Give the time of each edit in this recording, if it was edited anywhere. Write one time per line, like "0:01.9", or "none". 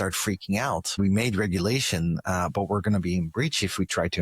0:00.9